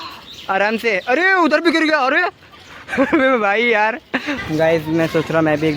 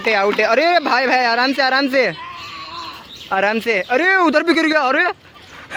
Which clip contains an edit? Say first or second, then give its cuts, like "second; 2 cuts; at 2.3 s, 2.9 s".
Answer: first; 1 cut; at 4.3 s